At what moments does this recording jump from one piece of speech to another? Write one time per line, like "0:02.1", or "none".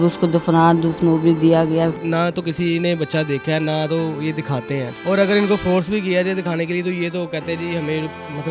0:02.0
0:04.9